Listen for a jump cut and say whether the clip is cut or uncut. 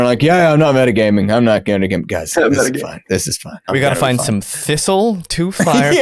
cut